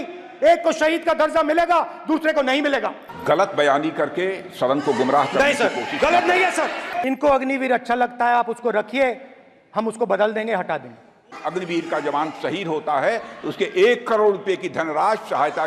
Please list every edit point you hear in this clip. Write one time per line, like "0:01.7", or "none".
0:06.9
0:11.3